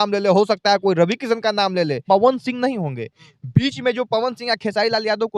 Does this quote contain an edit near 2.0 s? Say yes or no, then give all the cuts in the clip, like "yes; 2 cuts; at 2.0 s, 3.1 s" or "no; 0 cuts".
yes; 1 cut; at 2.0 s